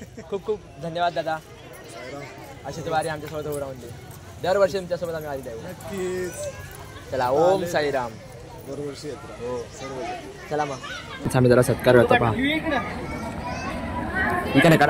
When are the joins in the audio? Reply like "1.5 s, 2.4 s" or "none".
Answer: 11.3 s

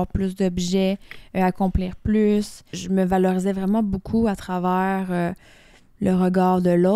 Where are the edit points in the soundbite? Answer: 2.8 s

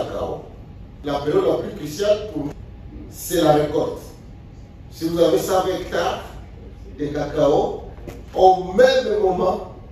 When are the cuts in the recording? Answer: 1.0 s, 2.5 s

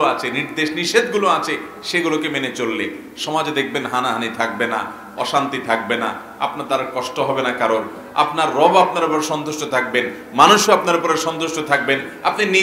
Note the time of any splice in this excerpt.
none

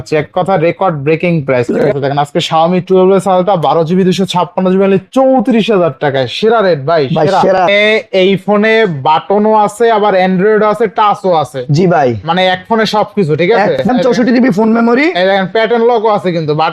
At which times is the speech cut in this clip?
1.8 s, 7.6 s, 13.8 s

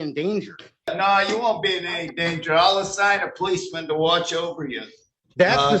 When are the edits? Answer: 0.9 s

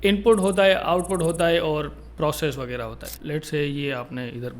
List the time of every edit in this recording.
3.2 s

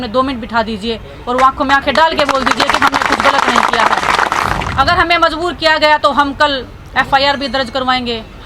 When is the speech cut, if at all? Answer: 4.6 s

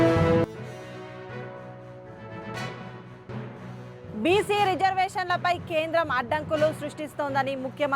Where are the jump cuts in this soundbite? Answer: 2.5 s

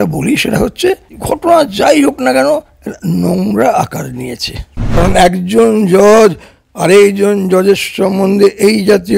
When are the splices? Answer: 1.1 s, 5.0 s

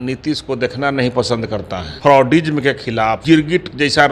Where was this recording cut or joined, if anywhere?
1.8 s, 3.2 s

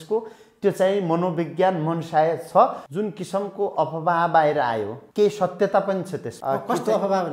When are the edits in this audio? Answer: 2.8 s, 5.0 s, 6.2 s

